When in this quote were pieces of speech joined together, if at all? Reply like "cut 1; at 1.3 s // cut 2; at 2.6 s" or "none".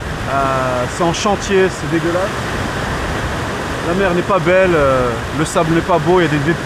none